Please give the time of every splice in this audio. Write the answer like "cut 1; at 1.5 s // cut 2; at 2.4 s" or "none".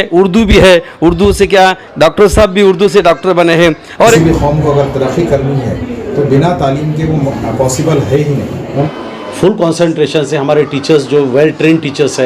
cut 1; at 4.2 s // cut 2; at 8.9 s